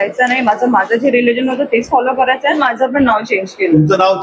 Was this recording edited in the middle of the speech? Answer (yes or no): yes